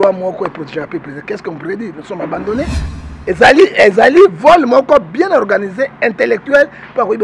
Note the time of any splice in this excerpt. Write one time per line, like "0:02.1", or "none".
0:02.8